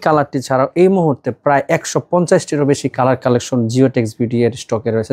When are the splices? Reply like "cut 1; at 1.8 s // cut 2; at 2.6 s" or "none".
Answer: none